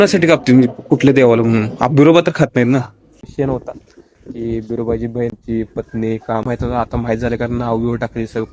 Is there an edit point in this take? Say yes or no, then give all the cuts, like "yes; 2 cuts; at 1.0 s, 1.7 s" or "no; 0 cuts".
yes; 3 cuts; at 3.3 s, 5.4 s, 6.5 s